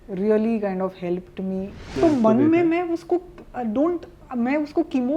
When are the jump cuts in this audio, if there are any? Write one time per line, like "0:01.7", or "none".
0:01.9